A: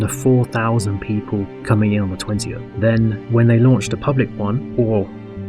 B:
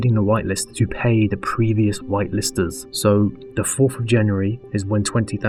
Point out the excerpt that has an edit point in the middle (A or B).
A